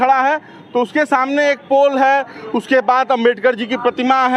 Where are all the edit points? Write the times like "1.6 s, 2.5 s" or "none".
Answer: none